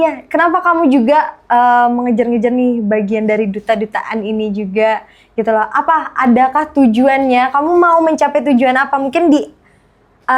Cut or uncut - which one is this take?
uncut